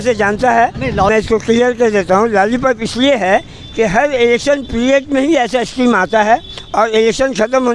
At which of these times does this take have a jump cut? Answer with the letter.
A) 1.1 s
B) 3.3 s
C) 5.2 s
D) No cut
A